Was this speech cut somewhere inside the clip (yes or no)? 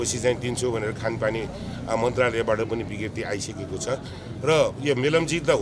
no